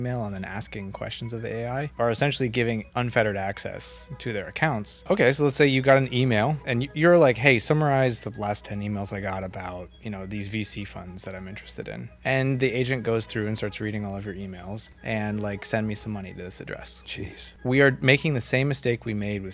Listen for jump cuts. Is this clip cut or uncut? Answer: cut